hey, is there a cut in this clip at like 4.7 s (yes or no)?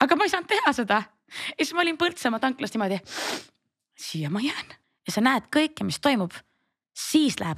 yes